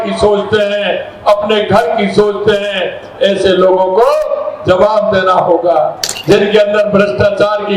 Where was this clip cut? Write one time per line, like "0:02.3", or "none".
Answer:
0:06.1